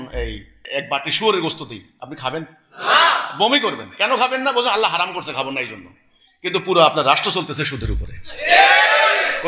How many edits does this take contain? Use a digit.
0